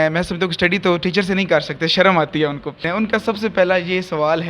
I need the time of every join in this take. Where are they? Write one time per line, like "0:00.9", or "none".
0:02.8